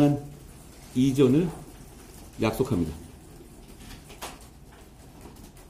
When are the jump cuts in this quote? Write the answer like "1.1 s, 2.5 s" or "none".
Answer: none

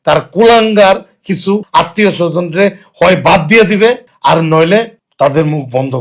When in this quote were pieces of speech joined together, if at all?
1.7 s, 4.1 s, 5.0 s

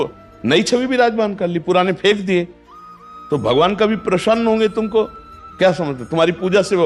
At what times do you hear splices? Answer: none

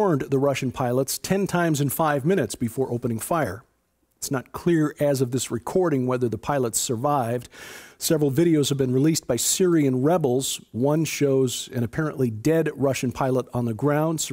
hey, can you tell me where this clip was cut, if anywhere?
3.9 s

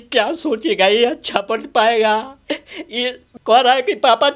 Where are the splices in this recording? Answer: 3.3 s

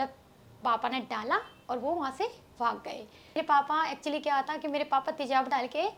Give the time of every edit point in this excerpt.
3.4 s

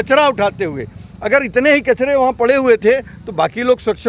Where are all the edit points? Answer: none

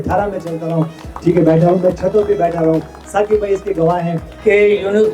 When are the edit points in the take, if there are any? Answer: 4.2 s

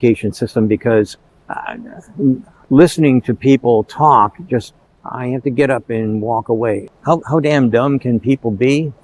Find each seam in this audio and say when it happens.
6.9 s

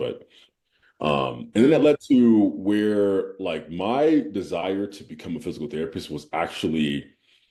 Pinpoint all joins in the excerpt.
none

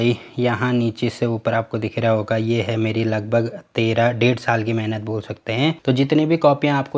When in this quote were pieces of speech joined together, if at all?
none

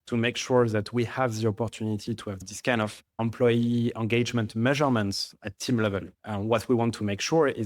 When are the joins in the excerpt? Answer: 2.4 s, 3.0 s, 6.2 s

